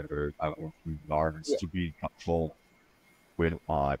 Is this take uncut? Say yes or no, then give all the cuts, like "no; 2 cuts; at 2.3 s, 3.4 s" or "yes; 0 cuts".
yes; 0 cuts